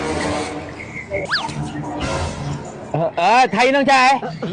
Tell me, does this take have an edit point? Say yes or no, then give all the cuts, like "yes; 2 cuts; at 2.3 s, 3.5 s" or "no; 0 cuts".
yes; 1 cut; at 1.3 s